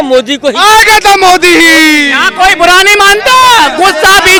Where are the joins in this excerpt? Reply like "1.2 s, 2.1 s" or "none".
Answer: none